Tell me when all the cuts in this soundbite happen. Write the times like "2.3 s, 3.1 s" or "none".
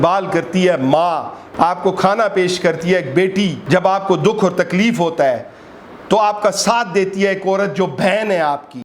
1.4 s, 3.6 s